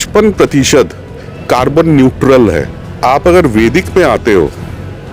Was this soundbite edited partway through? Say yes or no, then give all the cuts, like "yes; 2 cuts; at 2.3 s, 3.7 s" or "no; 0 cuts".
yes; 1 cut; at 3.0 s